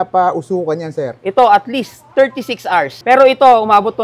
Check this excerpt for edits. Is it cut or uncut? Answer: cut